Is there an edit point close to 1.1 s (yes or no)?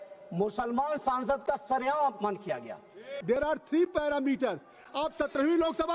no